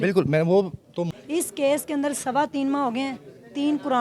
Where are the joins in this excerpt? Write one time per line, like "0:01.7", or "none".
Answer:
0:01.1